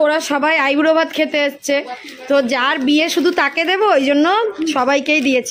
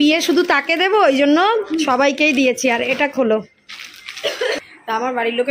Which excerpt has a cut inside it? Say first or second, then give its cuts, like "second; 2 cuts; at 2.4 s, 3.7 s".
second; 1 cut; at 4.6 s